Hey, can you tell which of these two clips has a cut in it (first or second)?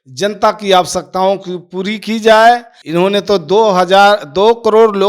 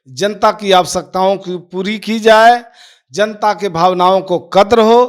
first